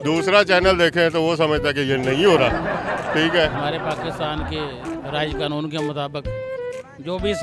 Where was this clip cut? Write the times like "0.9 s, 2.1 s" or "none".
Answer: 3.6 s